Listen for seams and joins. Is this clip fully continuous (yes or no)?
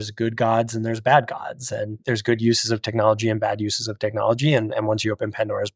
yes